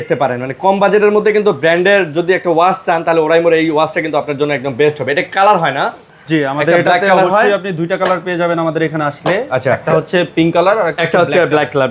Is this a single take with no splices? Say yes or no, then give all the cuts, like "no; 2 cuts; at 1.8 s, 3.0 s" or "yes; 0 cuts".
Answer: yes; 0 cuts